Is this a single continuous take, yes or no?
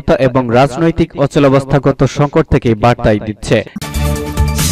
no